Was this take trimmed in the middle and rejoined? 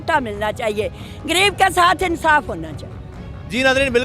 no; 0 cuts

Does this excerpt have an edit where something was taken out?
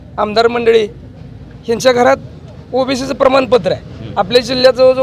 no; 0 cuts

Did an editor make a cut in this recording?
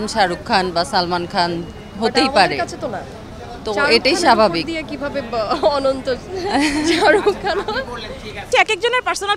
no; 0 cuts

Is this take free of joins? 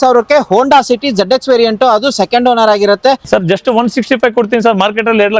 no; 1 cut; at 3.2 s

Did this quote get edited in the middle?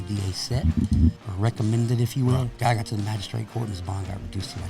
yes; 2 cuts; at 1.3 s, 2.5 s

